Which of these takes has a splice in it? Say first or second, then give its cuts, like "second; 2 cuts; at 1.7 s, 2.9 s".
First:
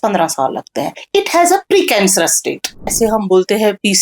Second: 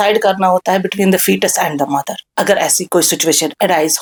first; 1 cut; at 2.9 s